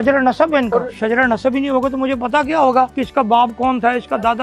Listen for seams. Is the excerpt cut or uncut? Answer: cut